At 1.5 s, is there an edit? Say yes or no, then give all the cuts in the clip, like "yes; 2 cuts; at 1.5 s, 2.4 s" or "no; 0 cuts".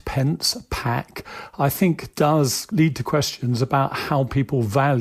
no; 1 cut; at 2.7 s